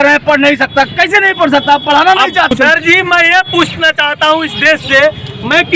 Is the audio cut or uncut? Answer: cut